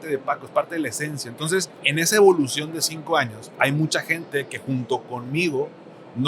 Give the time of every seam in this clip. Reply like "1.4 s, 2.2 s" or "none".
1.8 s, 3.5 s